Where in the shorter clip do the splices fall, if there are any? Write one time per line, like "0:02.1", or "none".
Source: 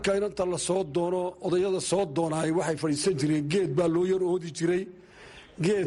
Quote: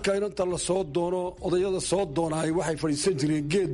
none